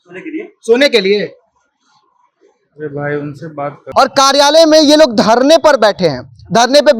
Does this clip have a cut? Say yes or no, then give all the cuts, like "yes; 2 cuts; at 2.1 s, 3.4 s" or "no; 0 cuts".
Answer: yes; 1 cut; at 3.8 s